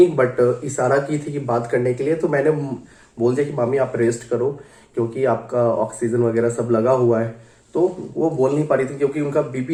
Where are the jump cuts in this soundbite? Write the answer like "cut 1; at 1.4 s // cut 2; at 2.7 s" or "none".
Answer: none

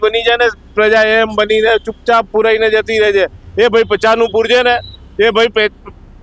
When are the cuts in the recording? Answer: none

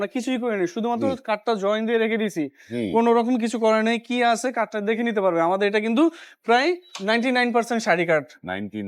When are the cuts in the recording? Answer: none

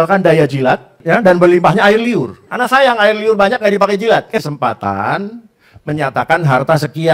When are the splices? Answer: cut 1; at 0.9 s // cut 2; at 2.4 s

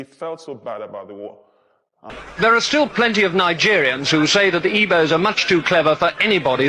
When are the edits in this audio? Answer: cut 1; at 2.0 s

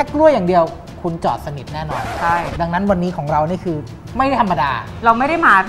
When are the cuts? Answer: none

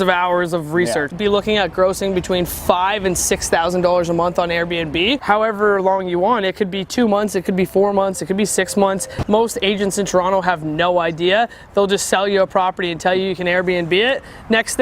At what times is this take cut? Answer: cut 1; at 1.1 s // cut 2; at 5.2 s // cut 3; at 9.1 s

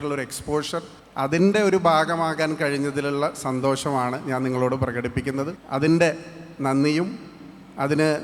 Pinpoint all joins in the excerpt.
cut 1; at 1.0 s // cut 2; at 5.6 s

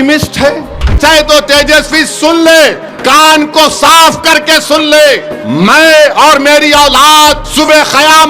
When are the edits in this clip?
cut 1; at 0.9 s // cut 2; at 2.9 s // cut 3; at 5.1 s // cut 4; at 7.4 s

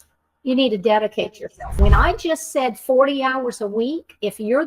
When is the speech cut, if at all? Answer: cut 1; at 1.8 s

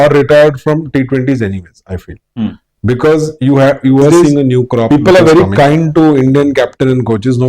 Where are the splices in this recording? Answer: cut 1; at 4.9 s

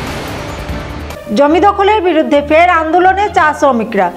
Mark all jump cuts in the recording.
cut 1; at 1.1 s

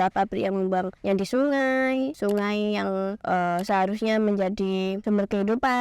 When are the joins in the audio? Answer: cut 1; at 0.9 s // cut 2; at 2.1 s // cut 3; at 3.2 s // cut 4; at 5.0 s

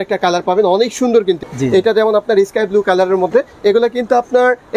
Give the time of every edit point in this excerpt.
cut 1; at 1.4 s

